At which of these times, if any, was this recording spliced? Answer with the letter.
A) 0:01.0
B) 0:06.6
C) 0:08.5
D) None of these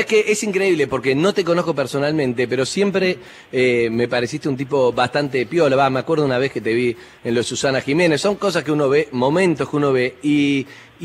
B